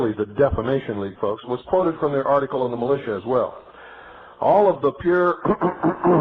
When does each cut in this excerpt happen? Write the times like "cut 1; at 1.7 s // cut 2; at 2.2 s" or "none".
cut 1; at 5.3 s

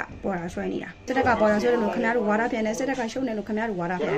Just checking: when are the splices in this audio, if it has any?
cut 1; at 1.0 s

